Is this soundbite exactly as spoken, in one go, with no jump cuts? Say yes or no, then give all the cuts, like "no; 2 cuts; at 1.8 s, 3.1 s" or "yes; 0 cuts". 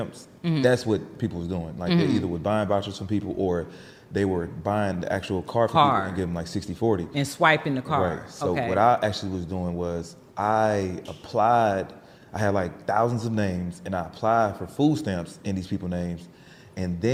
yes; 0 cuts